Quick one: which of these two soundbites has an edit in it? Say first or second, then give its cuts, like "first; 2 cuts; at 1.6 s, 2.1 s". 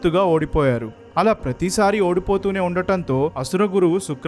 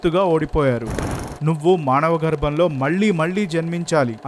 second; 1 cut; at 1.1 s